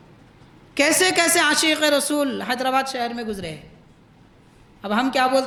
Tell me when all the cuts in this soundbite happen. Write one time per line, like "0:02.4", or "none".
none